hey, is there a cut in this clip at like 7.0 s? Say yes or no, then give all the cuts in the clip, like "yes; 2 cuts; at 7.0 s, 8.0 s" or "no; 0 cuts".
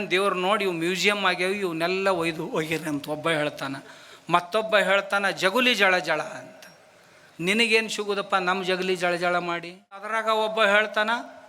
no; 1 cut; at 10.1 s